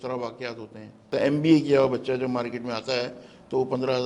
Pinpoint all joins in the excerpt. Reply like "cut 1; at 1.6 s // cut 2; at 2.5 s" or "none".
cut 1; at 1.1 s